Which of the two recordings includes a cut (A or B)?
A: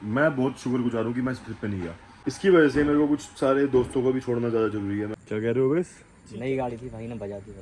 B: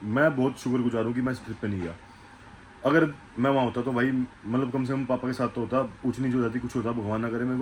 A